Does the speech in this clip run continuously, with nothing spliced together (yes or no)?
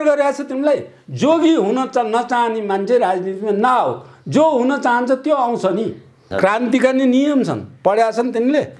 no